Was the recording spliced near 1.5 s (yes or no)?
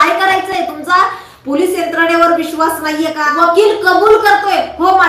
no